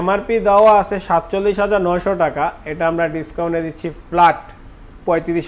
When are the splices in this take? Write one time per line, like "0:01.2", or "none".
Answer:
none